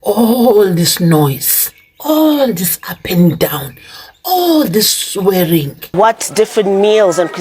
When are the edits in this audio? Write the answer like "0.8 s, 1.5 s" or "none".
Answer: 5.8 s